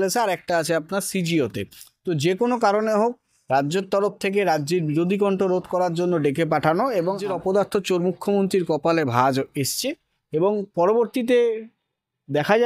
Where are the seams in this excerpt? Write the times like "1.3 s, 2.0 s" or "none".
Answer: 7.3 s

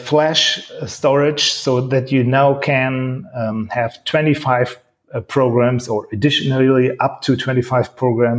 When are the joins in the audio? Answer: none

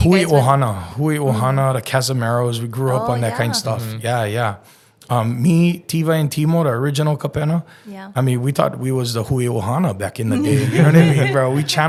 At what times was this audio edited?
none

